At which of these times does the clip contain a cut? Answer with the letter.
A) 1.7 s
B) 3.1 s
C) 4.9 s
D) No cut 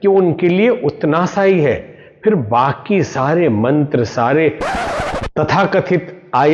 C